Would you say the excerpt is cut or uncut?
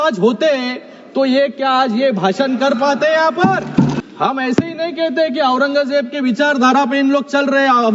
cut